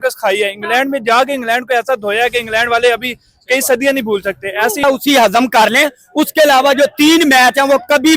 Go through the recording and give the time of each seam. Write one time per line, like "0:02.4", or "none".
0:04.8